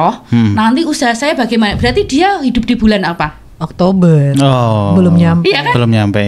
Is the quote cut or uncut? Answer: uncut